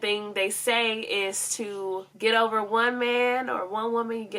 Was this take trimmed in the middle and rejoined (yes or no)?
no